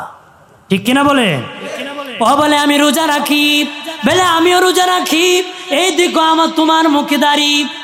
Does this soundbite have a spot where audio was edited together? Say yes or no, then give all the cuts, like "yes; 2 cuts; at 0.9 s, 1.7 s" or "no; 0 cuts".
no; 0 cuts